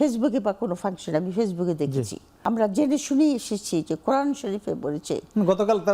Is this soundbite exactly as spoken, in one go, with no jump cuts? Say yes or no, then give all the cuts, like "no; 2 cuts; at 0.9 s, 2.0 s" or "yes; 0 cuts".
no; 1 cut; at 2.3 s